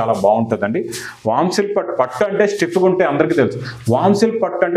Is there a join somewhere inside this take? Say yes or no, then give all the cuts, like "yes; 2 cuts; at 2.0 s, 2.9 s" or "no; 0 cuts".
no; 0 cuts